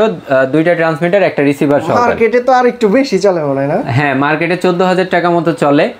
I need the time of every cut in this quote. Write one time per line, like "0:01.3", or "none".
none